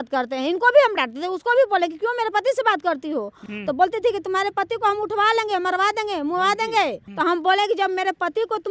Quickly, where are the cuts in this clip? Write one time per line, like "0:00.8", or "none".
0:03.4
0:07.0